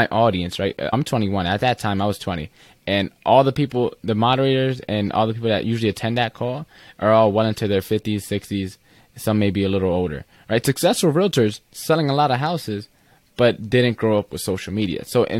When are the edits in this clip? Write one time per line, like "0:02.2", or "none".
0:00.9

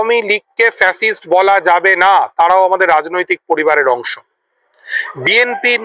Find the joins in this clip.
none

